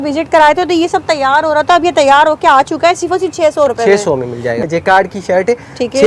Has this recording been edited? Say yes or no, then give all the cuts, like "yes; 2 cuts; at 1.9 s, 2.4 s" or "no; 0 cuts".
yes; 1 cut; at 4.6 s